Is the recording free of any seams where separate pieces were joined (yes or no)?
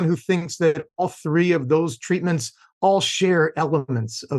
yes